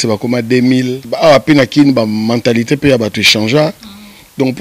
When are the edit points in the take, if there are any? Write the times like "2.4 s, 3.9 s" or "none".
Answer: 1.0 s